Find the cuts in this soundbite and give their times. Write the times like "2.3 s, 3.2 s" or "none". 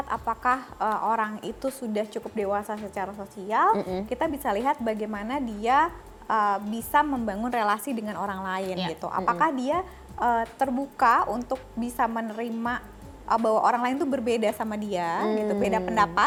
none